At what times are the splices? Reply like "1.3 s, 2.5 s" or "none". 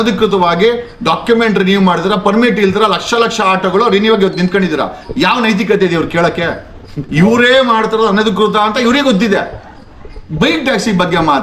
none